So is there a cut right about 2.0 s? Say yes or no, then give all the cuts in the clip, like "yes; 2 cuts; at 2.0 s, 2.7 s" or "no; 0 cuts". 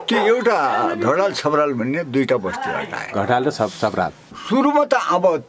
no; 1 cut; at 4.2 s